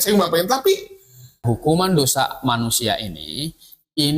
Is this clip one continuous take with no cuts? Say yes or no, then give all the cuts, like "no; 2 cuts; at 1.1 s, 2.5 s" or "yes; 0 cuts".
no; 1 cut; at 1.4 s